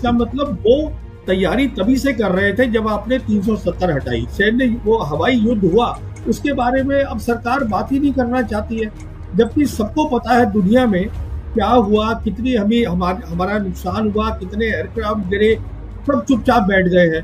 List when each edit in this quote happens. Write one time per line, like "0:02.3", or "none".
0:04.3